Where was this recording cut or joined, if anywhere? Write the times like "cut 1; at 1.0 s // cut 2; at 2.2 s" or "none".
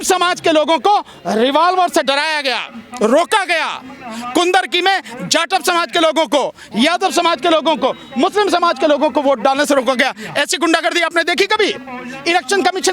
none

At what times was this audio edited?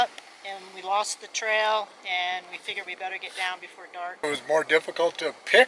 cut 1; at 4.2 s

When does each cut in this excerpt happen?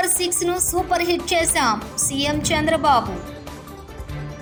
none

